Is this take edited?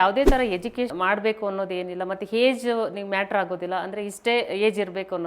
yes; 1 cut; at 0.9 s

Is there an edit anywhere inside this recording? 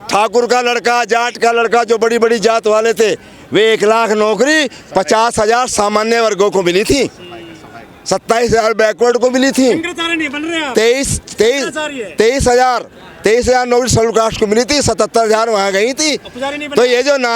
no; 0 cuts

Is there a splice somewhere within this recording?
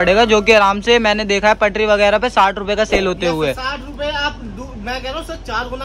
no; 0 cuts

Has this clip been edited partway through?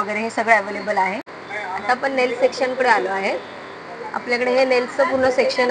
yes; 1 cut; at 1.3 s

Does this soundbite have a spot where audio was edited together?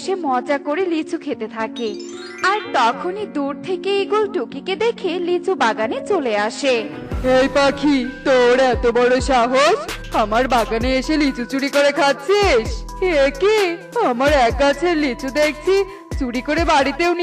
no; 0 cuts

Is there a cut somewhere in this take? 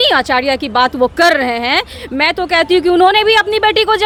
no; 0 cuts

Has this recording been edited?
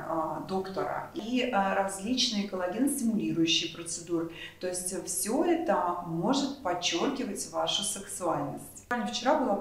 yes; 2 cuts; at 1.2 s, 8.9 s

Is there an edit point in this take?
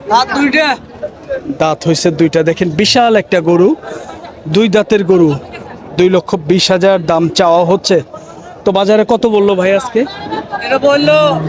no; 0 cuts

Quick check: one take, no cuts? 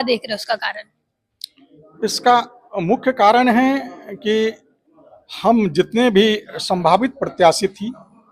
yes; 0 cuts

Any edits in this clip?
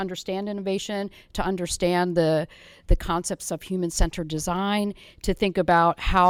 no; 0 cuts

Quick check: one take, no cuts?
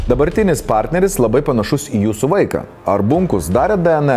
yes; 0 cuts

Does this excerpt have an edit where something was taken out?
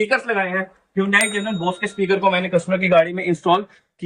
no; 0 cuts

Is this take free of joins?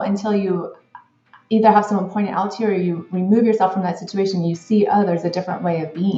yes; 0 cuts

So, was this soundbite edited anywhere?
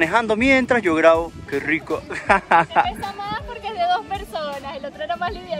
no; 0 cuts

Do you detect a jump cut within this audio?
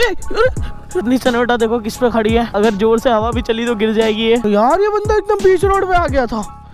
yes; 3 cuts; at 0.9 s, 2.4 s, 4.4 s

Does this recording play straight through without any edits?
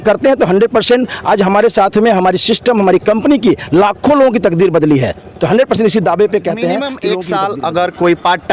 no; 1 cut; at 7.0 s

